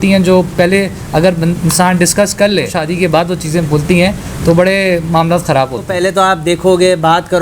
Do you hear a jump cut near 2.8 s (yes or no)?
yes